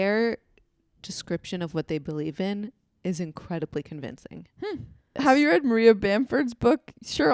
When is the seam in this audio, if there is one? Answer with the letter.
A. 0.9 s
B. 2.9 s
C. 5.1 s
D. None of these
C